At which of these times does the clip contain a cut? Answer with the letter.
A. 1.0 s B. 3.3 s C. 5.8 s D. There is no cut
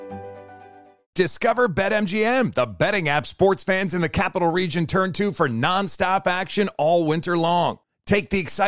A